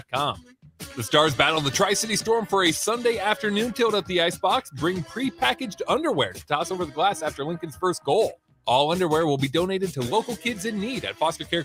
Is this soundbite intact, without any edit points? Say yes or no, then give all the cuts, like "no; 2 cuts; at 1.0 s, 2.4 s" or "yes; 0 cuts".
yes; 0 cuts